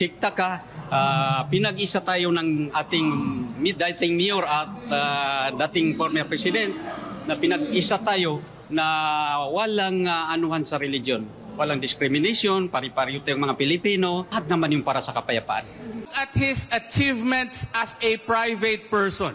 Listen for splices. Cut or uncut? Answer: cut